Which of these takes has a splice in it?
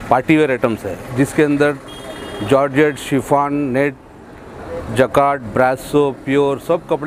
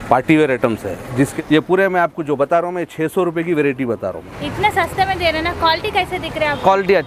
second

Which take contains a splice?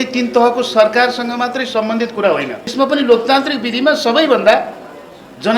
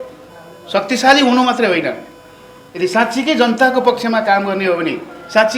first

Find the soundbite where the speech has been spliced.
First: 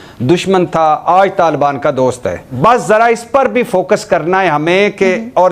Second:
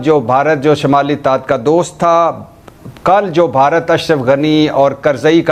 first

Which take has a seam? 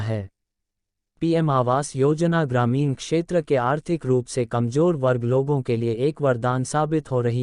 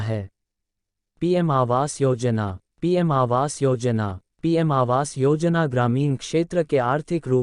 first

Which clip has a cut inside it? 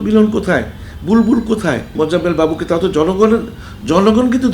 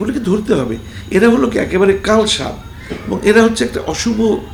first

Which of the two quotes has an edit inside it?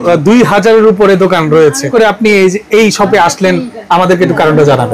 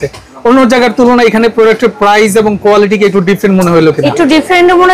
first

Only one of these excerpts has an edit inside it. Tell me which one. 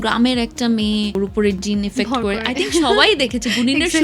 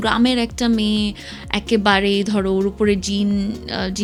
first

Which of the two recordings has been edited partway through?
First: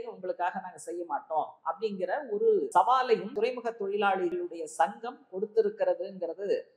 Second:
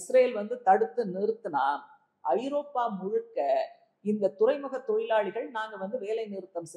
first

